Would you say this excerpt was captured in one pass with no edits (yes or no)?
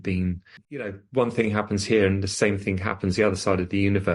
no